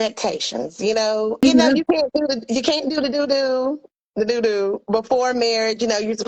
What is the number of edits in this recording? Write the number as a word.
one